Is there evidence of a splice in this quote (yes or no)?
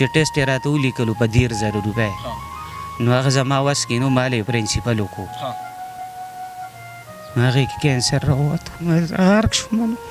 yes